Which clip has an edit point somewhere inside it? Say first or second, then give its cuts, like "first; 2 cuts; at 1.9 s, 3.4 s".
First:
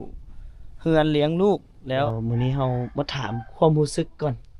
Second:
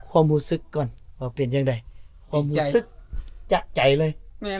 first; 1 cut; at 2.0 s